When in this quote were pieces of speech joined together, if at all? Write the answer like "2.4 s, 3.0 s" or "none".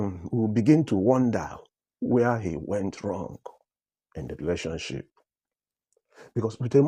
none